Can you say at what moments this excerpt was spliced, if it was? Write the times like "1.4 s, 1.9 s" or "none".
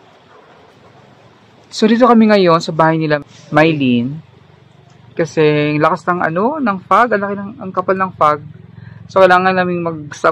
3.2 s